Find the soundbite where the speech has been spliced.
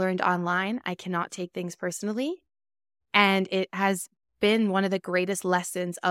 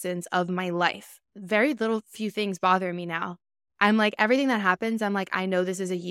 second; 1 cut; at 1.3 s

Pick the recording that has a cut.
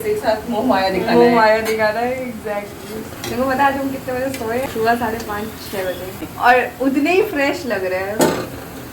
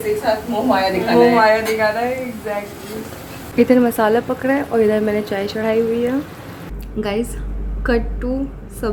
first; 3 cuts; at 3.2 s, 4.7 s, 6.2 s

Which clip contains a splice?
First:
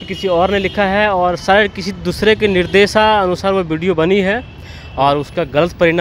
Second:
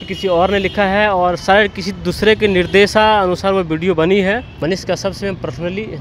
second; 1 cut; at 4.5 s

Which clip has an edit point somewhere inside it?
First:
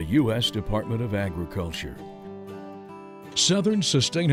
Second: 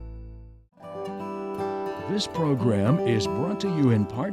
second; 2 cuts; at 0.9 s, 2.1 s

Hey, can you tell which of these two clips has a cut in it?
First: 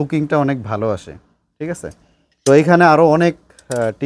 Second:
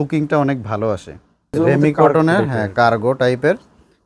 second; 1 cut; at 1.5 s

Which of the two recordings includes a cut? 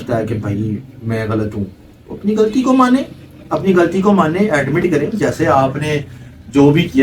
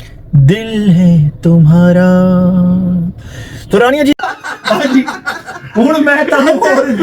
second; 1 cut; at 4.1 s

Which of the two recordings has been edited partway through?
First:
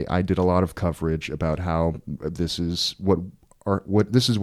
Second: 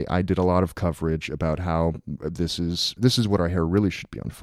second; 1 cut; at 3.0 s

